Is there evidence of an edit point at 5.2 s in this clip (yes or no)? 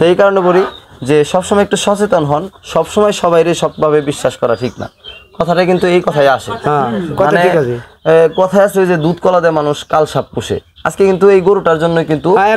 no